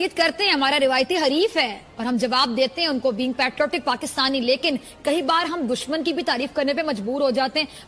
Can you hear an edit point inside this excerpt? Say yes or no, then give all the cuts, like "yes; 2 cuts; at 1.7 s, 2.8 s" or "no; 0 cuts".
no; 0 cuts